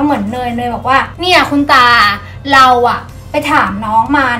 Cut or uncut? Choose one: uncut